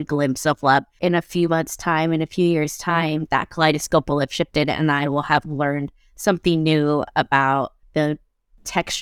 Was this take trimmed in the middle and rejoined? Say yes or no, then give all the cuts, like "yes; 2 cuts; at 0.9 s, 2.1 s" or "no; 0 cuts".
yes; 2 cuts; at 0.9 s, 7.8 s